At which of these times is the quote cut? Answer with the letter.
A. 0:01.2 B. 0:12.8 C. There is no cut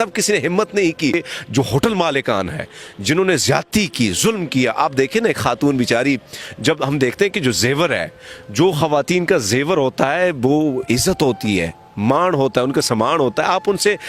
A